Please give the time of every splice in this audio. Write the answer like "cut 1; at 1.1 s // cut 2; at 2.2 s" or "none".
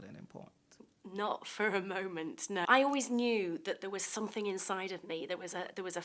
cut 1; at 2.6 s